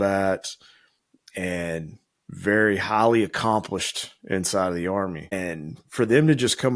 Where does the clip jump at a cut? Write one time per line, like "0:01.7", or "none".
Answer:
0:05.3